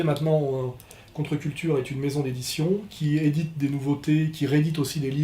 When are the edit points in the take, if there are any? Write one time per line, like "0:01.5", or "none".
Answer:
0:02.3

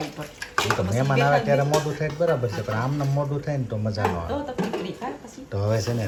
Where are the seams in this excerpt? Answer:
none

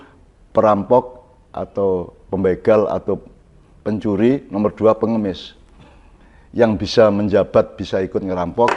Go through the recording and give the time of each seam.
none

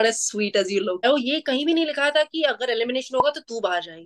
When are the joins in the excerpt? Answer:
0:01.0

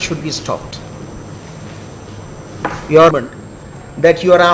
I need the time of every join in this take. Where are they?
0:03.1

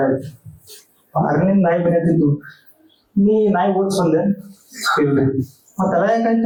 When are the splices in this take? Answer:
none

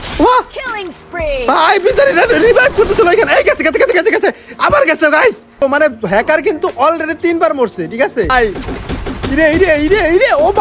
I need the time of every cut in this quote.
0:05.6
0:08.3

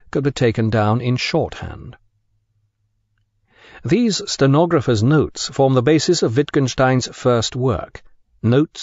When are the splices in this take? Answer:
none

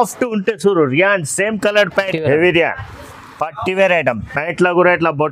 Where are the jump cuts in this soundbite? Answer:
0:02.1

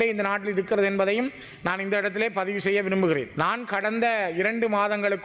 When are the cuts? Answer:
0:03.3

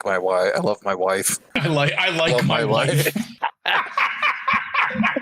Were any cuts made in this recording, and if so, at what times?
0:01.6
0:03.3

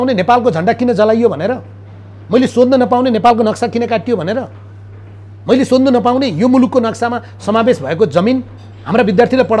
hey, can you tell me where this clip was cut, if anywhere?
none

